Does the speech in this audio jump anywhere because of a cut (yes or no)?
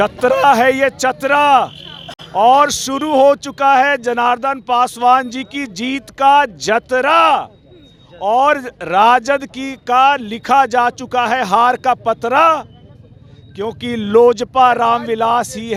no